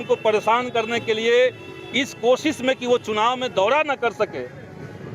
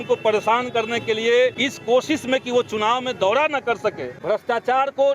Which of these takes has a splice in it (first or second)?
second